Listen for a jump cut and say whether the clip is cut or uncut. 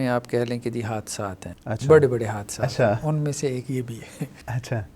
uncut